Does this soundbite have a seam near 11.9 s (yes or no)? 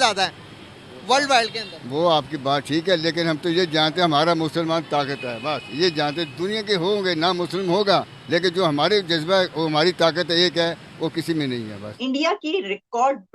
yes